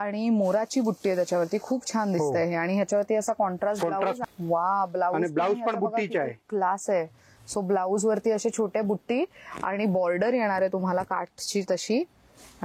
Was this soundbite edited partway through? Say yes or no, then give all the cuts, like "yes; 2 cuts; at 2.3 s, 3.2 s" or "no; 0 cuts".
yes; 1 cut; at 4.2 s